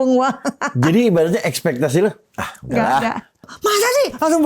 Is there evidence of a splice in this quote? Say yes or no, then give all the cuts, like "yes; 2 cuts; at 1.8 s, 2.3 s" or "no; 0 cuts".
yes; 1 cut; at 3.5 s